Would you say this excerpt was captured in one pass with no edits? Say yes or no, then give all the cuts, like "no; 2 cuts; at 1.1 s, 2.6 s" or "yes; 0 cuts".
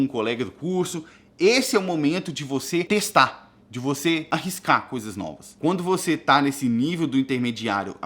no; 3 cuts; at 2.9 s, 4.2 s, 5.4 s